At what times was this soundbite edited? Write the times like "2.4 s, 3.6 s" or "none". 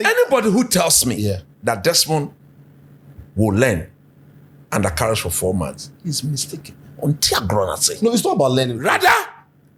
none

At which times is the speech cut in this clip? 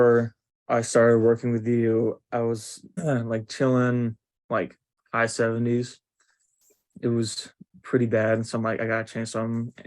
3.0 s

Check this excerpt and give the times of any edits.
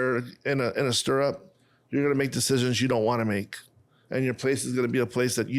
none

